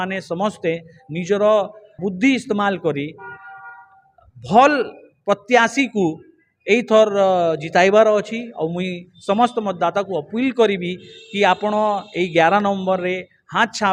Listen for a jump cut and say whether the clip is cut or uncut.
cut